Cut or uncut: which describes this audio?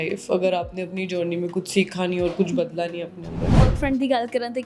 cut